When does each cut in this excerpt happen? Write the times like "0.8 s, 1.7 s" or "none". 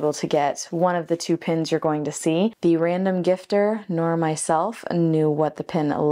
2.6 s